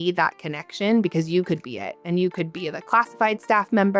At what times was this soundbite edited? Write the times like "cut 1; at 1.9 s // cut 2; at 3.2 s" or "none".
none